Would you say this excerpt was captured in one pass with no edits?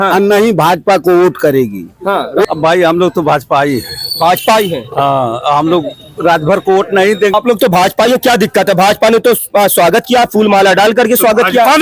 no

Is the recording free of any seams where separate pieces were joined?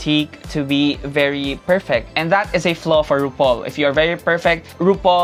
yes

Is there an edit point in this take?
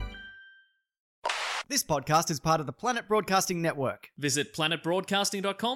yes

